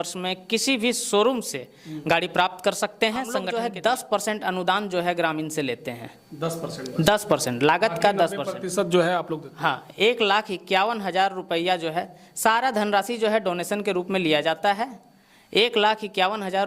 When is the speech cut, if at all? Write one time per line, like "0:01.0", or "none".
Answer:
0:03.5